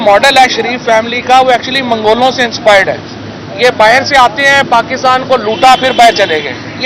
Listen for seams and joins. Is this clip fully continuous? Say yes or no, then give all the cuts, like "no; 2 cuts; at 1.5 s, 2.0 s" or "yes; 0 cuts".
yes; 0 cuts